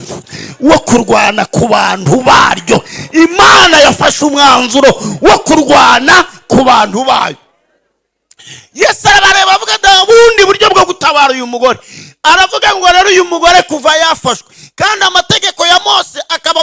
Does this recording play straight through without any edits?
yes; 0 cuts

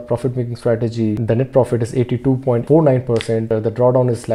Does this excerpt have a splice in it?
yes; 3 cuts; at 1.2 s, 2.6 s, 3.5 s

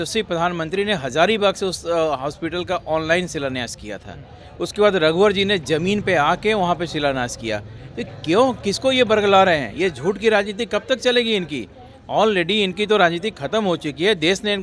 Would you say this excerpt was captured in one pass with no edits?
yes; 0 cuts

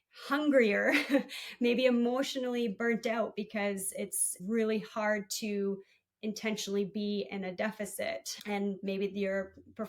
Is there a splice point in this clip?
yes; 2 cuts; at 4.3 s, 8.3 s

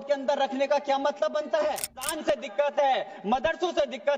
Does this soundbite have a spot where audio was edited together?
yes; 1 cut; at 2.1 s

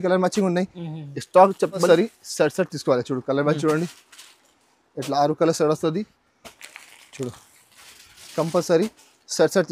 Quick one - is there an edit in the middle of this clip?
yes; 1 cut; at 1.9 s

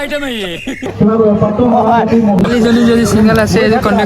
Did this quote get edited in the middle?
yes; 1 cut; at 2.5 s

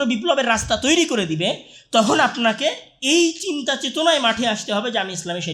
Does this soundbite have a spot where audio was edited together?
no; 0 cuts

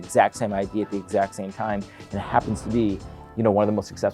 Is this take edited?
no; 0 cuts

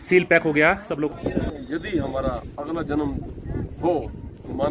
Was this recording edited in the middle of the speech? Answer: yes; 1 cut; at 1.1 s

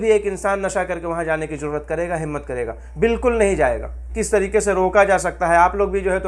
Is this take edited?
yes; 1 cut; at 4.1 s

